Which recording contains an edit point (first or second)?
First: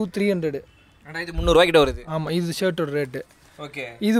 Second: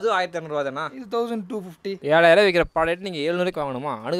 second